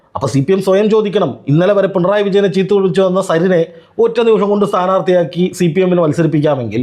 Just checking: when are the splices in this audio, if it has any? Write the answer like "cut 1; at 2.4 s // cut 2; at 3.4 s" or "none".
none